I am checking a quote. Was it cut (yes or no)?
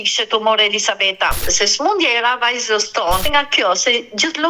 yes